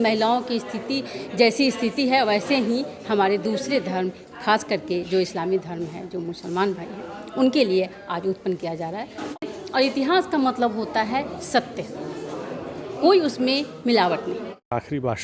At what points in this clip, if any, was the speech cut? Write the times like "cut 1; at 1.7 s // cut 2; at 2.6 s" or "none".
cut 1; at 9.3 s // cut 2; at 14.4 s